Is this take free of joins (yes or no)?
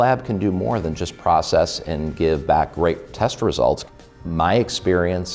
no